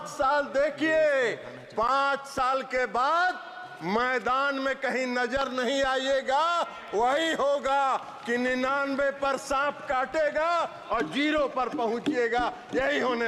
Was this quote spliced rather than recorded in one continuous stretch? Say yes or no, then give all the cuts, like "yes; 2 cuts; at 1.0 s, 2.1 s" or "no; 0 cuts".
no; 0 cuts